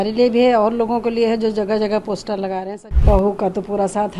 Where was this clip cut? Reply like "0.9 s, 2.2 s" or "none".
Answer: 2.8 s